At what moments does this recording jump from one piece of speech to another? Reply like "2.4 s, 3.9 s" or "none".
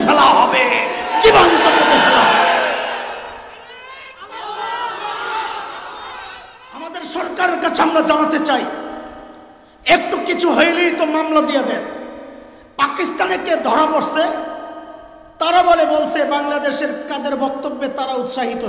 7.0 s